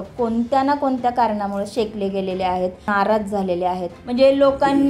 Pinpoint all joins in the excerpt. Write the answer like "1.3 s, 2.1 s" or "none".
2.9 s, 4.0 s

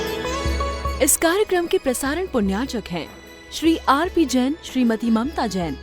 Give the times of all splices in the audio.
0.9 s

